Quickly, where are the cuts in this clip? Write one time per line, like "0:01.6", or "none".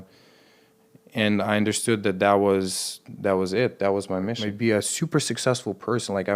0:04.6